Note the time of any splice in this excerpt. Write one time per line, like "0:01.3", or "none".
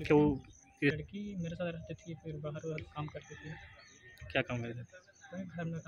0:01.0